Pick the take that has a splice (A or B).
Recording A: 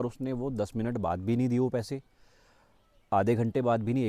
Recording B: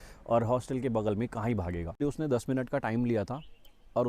B